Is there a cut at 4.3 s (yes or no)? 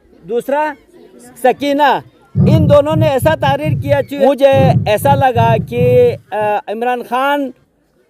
yes